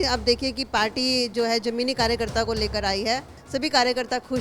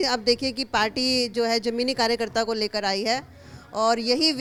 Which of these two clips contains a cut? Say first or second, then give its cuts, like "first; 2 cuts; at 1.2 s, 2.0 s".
first; 1 cut; at 3.4 s